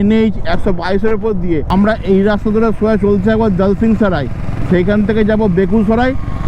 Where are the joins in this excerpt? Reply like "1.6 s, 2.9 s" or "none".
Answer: 1.7 s